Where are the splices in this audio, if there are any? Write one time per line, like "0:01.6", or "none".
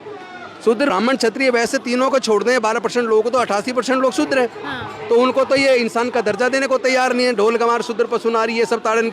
0:00.9